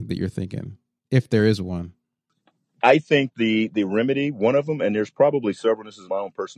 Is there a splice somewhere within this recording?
no; 0 cuts

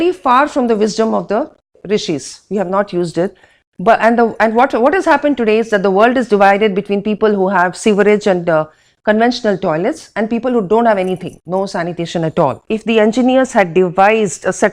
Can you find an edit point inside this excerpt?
yes; 1 cut; at 12.6 s

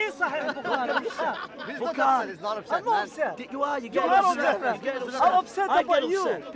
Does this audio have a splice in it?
no; 0 cuts

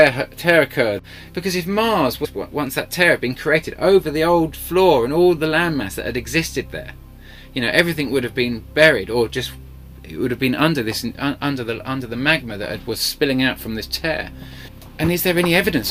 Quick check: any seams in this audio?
no; 0 cuts

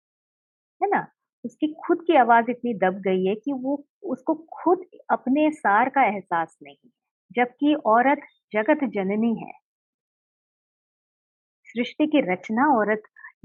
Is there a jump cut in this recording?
no; 0 cuts

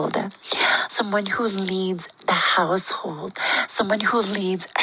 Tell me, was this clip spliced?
no; 0 cuts

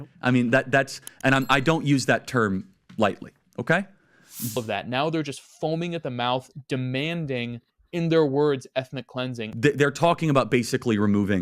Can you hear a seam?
yes; 2 cuts; at 4.6 s, 9.4 s

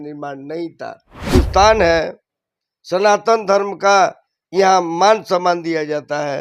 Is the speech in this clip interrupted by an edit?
yes; 1 cut; at 1.3 s

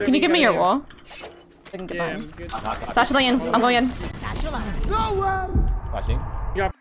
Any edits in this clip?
no; 0 cuts

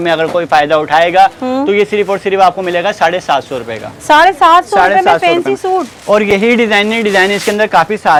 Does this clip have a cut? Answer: no; 0 cuts

